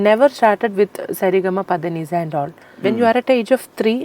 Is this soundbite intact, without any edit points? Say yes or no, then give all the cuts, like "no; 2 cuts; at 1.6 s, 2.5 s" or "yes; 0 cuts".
no; 1 cut; at 2.6 s